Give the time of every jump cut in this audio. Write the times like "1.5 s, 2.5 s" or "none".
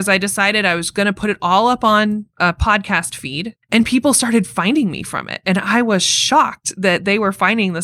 2.3 s, 3.5 s